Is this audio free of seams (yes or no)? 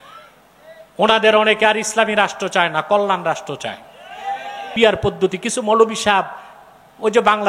no